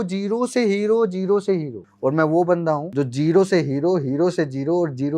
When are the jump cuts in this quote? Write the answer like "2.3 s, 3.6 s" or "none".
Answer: 1.8 s, 2.9 s